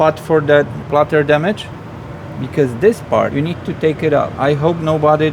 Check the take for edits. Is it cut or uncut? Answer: cut